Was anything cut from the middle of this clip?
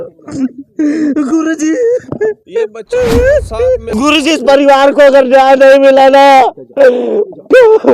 yes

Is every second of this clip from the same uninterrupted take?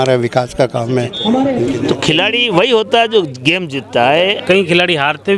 no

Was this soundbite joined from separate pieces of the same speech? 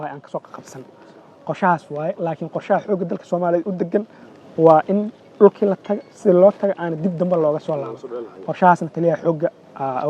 no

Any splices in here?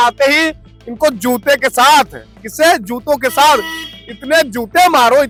no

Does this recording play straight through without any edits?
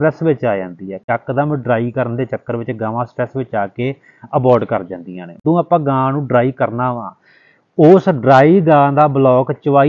no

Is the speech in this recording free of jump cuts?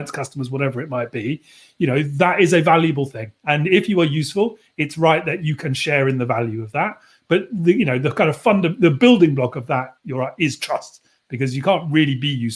yes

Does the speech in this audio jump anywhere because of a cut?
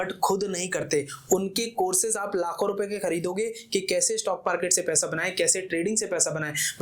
no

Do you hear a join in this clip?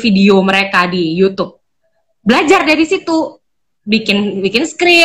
no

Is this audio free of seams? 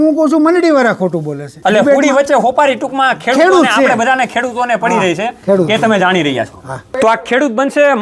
yes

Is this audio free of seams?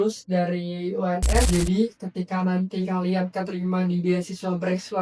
no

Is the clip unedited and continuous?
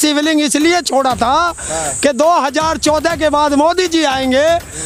yes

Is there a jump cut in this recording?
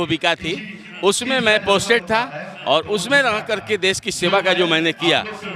no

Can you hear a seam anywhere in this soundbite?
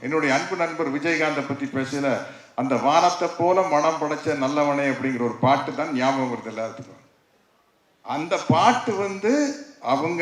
no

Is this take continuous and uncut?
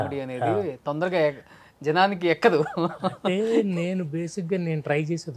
yes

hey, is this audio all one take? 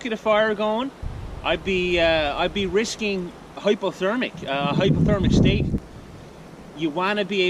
no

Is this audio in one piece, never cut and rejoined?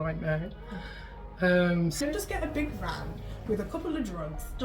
no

